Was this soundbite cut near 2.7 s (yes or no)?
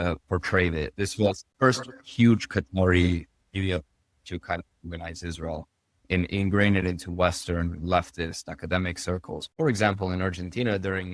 no